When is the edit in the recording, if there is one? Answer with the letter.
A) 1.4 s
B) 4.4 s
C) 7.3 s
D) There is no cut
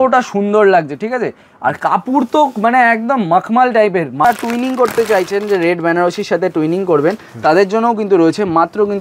B